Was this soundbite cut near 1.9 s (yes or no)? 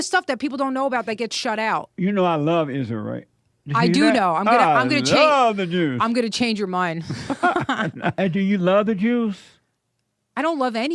yes